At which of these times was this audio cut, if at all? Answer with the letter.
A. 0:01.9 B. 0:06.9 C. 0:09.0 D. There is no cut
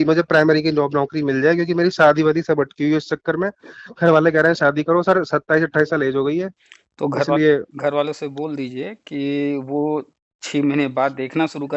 D